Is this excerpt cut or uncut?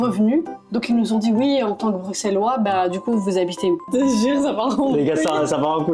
cut